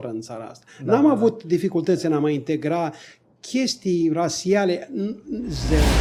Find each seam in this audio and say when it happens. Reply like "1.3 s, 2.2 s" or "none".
none